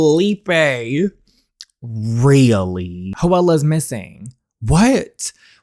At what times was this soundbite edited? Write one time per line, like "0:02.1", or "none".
0:03.1